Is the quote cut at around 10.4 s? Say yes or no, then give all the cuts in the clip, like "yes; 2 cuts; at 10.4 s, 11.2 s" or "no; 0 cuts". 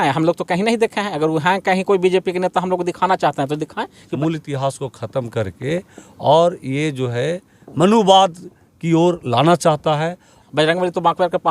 yes; 2 cuts; at 4.1 s, 10.4 s